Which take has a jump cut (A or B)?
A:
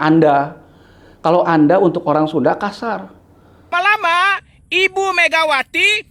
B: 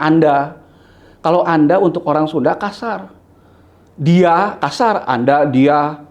A